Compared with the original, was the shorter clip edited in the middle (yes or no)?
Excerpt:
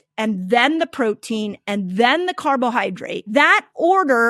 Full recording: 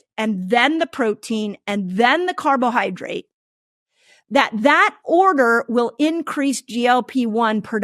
yes